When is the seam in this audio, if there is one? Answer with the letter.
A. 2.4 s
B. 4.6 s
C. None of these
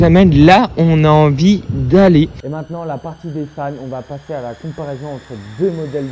A